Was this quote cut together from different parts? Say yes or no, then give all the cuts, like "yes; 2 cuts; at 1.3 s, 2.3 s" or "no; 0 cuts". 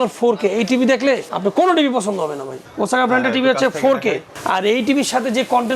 yes; 3 cuts; at 1.3 s, 2.6 s, 4.3 s